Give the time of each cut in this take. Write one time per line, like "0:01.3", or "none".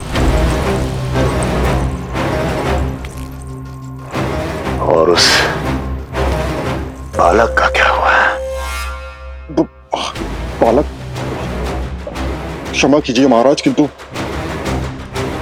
none